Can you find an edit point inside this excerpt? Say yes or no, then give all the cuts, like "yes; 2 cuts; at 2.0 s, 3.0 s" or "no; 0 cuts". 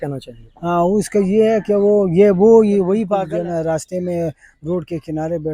yes; 1 cut; at 3.1 s